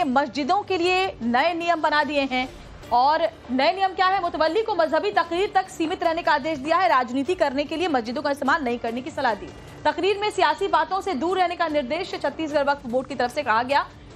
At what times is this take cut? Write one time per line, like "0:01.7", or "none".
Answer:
0:10.6

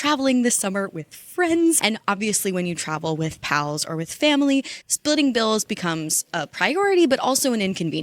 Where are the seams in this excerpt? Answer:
0:01.8

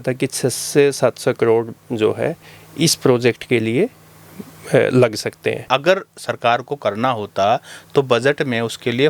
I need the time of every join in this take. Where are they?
0:05.7

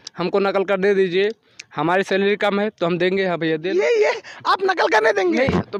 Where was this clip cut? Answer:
none

